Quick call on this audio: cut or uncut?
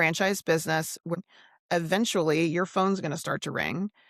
cut